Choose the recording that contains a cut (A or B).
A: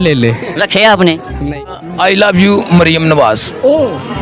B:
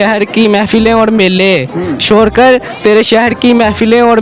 A